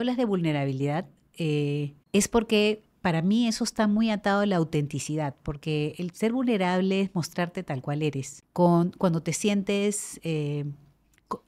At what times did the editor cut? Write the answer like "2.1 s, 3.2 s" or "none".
2.0 s, 8.3 s